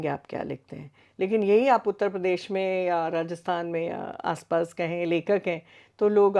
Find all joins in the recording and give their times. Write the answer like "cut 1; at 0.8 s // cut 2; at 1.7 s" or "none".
none